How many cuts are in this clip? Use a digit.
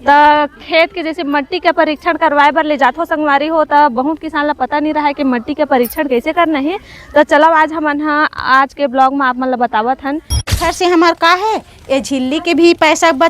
1